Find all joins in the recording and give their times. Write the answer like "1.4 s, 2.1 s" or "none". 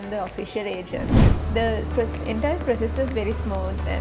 1.1 s